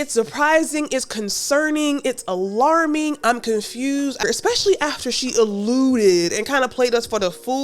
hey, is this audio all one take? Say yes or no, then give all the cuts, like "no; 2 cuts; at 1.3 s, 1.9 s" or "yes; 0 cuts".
no; 1 cut; at 4.2 s